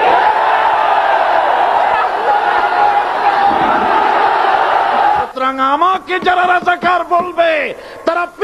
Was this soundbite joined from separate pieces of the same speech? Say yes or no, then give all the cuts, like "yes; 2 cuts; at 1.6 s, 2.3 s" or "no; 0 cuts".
yes; 1 cut; at 5.1 s